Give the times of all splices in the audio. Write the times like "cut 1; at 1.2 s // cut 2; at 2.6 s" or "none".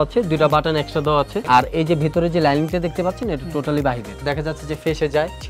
cut 1; at 1.4 s // cut 2; at 4.1 s